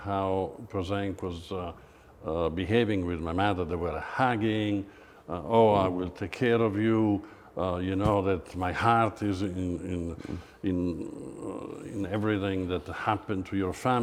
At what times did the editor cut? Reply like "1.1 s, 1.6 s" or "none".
none